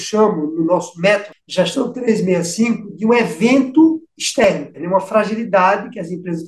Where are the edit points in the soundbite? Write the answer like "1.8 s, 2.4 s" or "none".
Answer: 1.4 s, 4.4 s

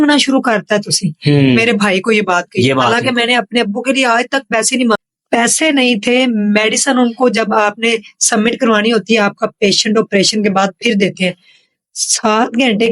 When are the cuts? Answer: 5.0 s

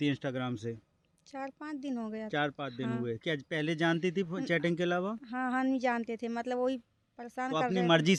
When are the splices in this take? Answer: none

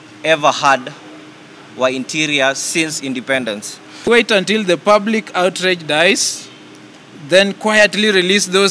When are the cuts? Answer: 4.1 s

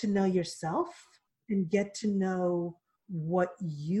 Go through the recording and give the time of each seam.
1.3 s

